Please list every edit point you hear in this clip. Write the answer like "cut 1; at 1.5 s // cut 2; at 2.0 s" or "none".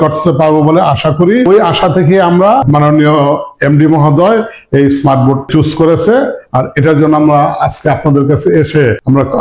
cut 1; at 5.5 s